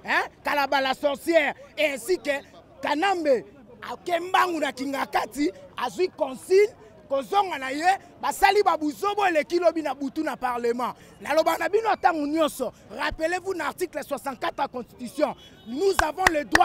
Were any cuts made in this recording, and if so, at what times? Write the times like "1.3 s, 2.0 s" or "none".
11.1 s